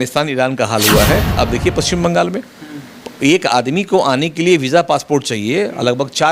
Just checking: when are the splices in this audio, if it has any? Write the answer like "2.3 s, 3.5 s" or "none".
1.3 s